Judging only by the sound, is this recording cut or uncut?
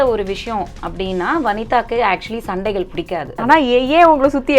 cut